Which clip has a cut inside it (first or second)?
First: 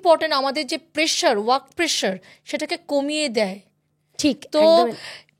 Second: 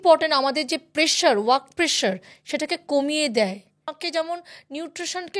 second